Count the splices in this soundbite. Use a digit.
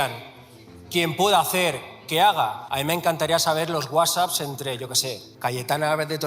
2